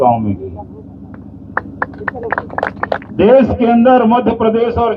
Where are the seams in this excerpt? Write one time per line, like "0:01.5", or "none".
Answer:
0:03.0